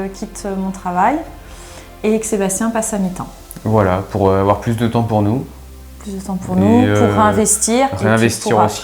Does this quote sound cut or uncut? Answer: uncut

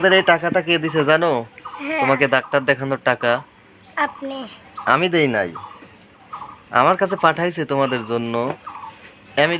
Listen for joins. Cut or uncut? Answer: uncut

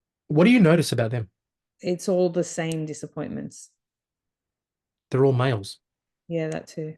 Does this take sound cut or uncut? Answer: uncut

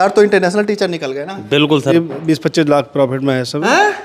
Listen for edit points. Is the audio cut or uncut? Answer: cut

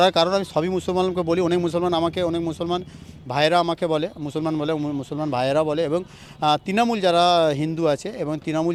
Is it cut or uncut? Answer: uncut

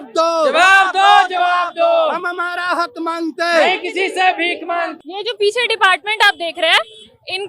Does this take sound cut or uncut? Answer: cut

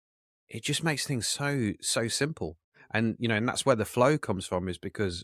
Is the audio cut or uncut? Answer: uncut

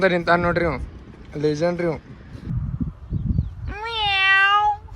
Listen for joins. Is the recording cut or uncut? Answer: cut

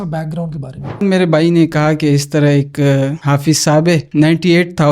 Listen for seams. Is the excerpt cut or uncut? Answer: cut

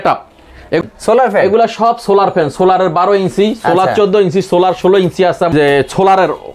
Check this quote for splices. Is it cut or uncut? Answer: cut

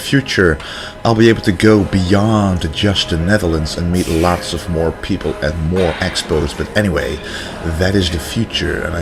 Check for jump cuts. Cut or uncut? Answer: uncut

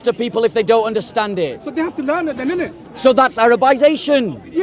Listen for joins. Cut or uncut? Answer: uncut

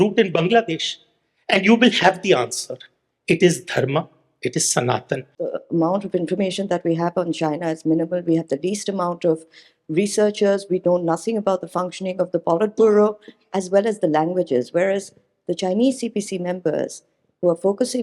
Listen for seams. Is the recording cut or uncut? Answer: cut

